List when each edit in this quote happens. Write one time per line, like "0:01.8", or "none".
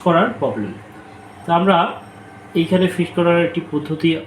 none